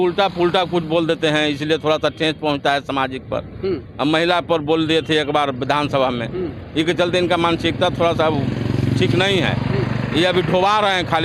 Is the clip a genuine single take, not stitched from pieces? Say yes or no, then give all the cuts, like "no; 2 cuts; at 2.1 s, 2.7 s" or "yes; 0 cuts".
yes; 0 cuts